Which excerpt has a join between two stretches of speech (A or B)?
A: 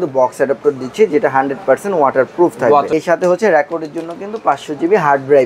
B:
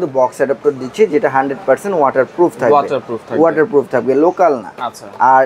A